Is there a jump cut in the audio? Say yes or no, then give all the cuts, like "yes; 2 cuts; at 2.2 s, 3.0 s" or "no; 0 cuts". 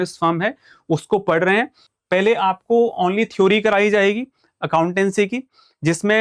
yes; 1 cut; at 1.8 s